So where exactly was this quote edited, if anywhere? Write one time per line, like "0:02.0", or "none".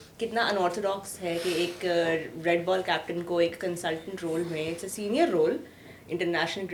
none